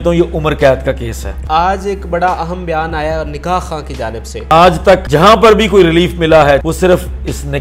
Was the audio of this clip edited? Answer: yes; 4 cuts; at 1.4 s, 4.5 s, 5.0 s, 6.6 s

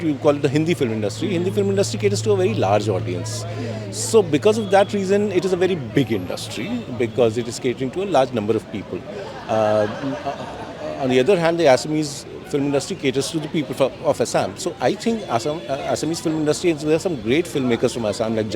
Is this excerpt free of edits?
yes; 0 cuts

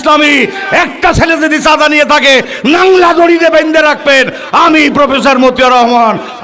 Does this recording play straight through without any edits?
yes; 0 cuts

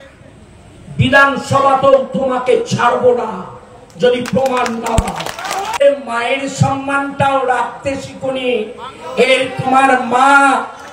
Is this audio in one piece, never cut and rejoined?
no; 1 cut; at 5.8 s

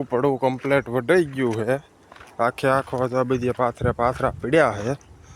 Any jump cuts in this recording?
no; 0 cuts

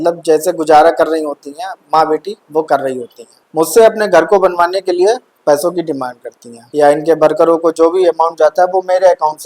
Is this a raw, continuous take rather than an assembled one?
no; 1 cut; at 6.7 s

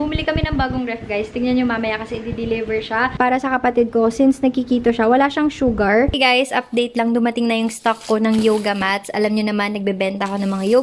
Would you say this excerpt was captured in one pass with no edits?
no; 2 cuts; at 3.1 s, 6.1 s

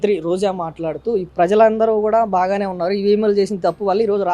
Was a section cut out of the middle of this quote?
yes; 1 cut; at 1.3 s

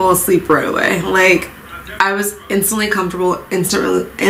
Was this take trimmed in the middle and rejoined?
no; 0 cuts

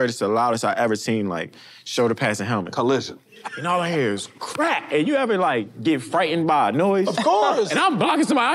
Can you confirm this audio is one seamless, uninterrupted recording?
no; 1 cut; at 3.5 s

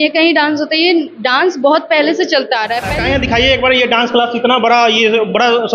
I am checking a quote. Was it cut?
yes; 1 cut; at 2.9 s

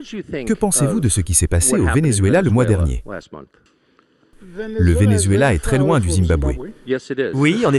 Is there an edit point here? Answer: no; 0 cuts

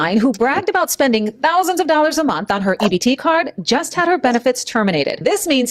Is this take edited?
yes; 1 cut; at 2.9 s

